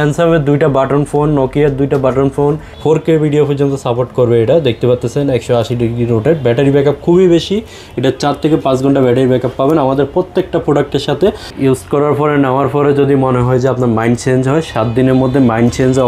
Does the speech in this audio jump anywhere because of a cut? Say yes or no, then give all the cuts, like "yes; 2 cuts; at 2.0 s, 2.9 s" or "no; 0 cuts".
yes; 2 cuts; at 2.7 s, 11.5 s